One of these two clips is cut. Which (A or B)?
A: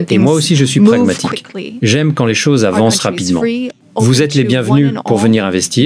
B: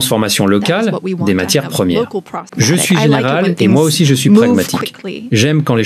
B